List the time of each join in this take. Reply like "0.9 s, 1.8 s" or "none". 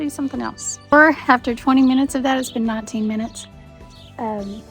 0.9 s